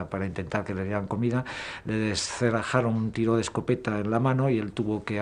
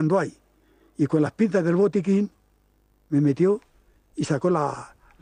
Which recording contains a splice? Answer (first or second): first